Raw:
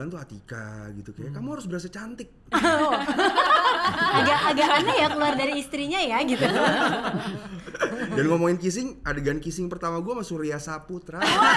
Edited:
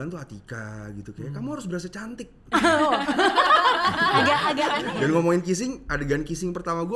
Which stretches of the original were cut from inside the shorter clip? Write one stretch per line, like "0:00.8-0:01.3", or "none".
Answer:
0:04.8-0:07.9